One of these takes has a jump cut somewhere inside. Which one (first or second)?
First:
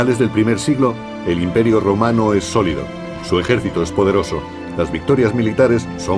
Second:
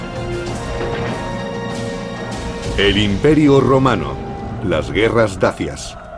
second